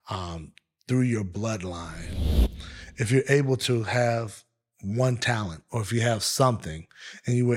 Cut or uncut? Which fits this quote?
cut